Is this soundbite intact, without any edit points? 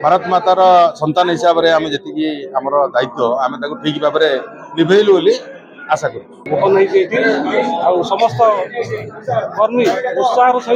no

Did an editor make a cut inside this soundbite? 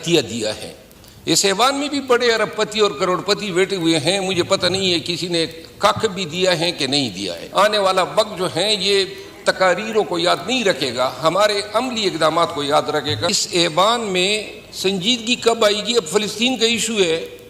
yes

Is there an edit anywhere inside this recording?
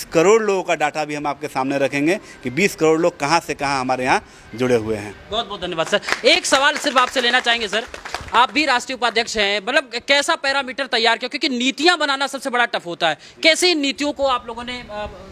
no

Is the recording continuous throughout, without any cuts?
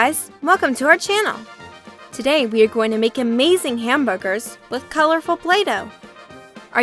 yes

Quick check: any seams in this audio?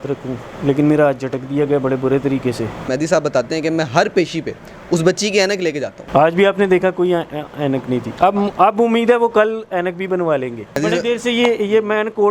yes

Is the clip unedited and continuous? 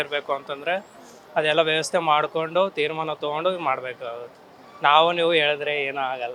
yes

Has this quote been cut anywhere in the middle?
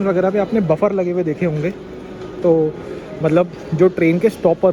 no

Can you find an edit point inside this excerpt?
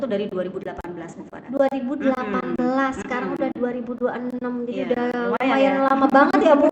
no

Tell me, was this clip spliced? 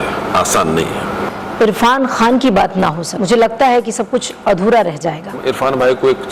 yes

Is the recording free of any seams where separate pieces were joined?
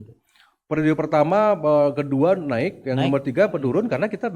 yes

